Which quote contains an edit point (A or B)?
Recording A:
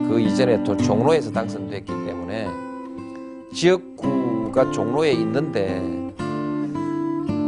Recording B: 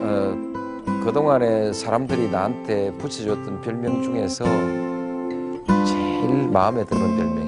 A